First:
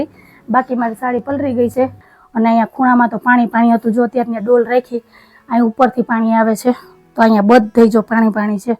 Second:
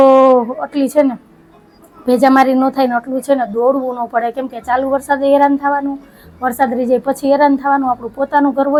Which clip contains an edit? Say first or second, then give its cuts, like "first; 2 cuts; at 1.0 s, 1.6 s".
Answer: first; 1 cut; at 2.0 s